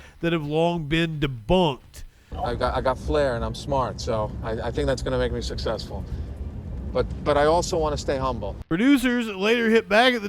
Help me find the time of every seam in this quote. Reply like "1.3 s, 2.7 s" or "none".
2.3 s, 8.5 s